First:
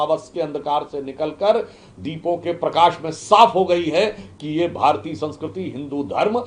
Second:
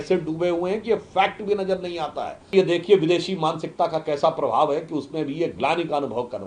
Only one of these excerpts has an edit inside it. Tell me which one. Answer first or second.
second